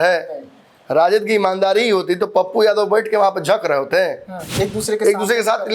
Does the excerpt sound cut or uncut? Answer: cut